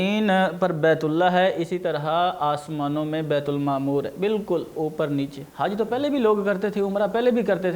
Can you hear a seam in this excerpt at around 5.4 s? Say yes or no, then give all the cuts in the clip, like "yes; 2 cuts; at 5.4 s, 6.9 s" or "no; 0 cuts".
yes; 1 cut; at 5.4 s